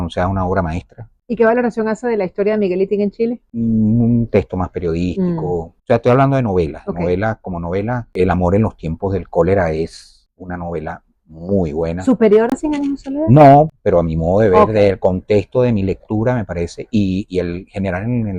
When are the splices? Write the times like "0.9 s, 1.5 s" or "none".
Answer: none